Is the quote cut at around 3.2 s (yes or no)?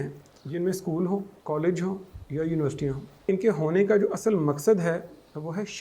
yes